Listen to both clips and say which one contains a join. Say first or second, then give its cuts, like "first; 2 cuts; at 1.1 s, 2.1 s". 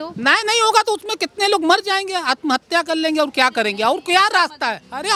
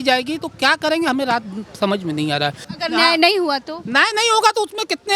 second; 1 cut; at 2.6 s